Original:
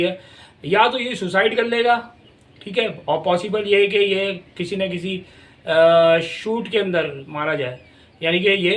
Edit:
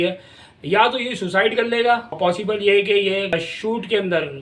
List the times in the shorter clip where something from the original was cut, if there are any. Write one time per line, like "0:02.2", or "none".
0:02.2
0:03.3